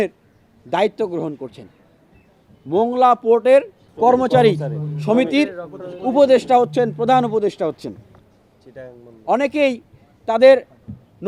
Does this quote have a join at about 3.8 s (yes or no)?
yes